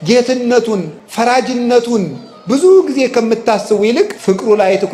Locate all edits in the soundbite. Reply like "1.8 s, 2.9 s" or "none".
1.0 s, 4.2 s